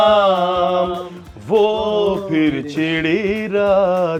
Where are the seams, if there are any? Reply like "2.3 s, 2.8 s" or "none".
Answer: none